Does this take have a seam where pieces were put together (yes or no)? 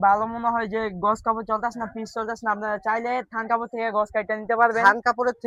no